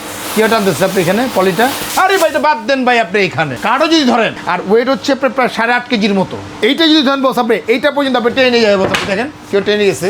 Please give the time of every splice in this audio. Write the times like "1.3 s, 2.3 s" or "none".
1.8 s, 3.5 s, 4.4 s, 6.4 s